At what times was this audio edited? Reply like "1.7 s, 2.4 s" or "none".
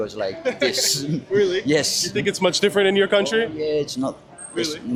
none